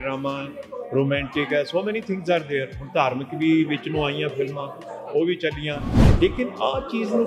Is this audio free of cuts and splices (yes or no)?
yes